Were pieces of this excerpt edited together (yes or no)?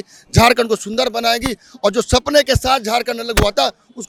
no